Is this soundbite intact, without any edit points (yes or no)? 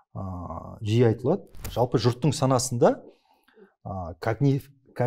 no